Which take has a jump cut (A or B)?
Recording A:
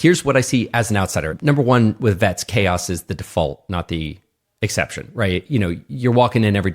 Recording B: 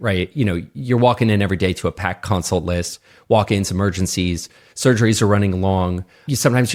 A